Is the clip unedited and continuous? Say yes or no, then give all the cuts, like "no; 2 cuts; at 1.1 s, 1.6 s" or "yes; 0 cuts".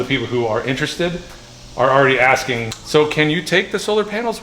no; 1 cut; at 2.7 s